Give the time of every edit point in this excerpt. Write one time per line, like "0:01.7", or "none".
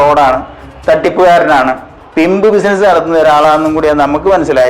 0:01.9